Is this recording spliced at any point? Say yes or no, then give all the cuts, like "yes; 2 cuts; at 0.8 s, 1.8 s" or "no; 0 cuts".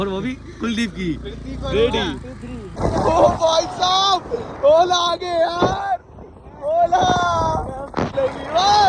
yes; 2 cuts; at 2.7 s, 8.1 s